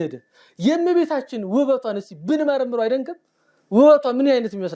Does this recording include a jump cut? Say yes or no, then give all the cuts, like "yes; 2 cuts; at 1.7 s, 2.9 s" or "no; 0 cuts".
no; 0 cuts